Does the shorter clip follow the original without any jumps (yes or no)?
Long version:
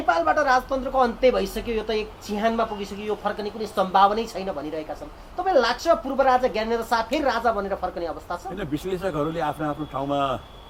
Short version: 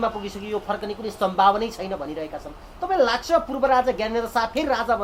yes